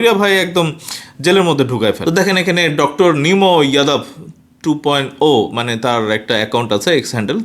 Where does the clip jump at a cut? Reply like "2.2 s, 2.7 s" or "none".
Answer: 2.0 s